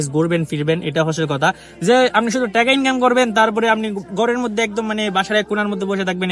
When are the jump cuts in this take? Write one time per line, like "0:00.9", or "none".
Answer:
none